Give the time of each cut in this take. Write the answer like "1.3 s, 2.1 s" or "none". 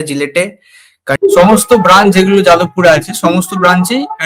1.1 s